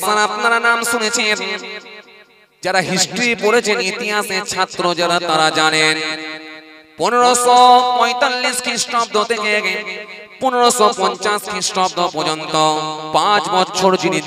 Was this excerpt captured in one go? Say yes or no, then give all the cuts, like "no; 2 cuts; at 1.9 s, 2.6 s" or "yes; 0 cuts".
yes; 0 cuts